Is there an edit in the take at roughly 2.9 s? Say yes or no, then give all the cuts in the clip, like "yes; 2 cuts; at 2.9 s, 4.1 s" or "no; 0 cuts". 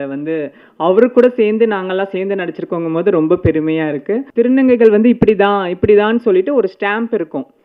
no; 1 cut; at 4.3 s